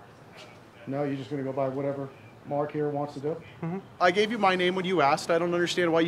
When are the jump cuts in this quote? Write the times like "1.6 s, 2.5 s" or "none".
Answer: 3.9 s